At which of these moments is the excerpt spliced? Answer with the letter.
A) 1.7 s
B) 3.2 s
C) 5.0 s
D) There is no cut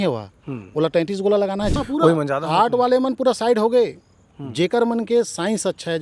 A